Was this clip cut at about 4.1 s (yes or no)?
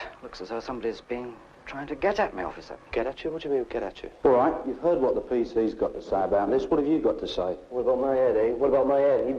yes